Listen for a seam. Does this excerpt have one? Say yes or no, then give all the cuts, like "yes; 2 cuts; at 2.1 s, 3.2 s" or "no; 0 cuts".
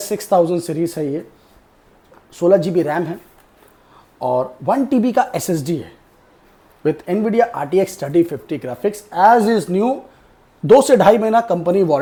no; 0 cuts